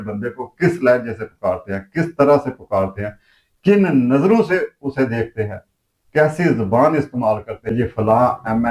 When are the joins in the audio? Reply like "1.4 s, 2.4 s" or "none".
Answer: 7.7 s